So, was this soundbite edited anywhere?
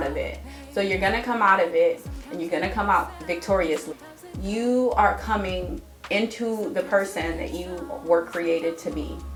no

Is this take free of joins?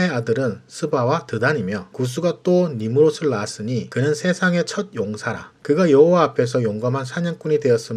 no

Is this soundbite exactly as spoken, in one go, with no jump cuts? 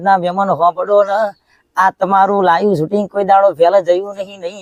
yes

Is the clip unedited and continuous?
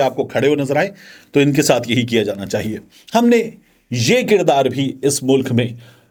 yes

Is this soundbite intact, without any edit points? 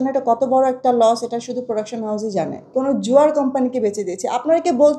no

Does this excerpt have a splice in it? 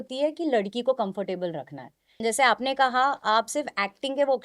yes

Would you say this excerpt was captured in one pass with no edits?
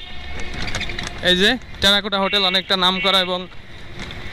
yes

